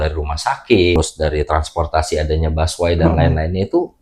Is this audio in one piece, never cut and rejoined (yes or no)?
no